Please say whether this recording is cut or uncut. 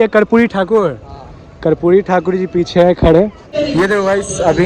cut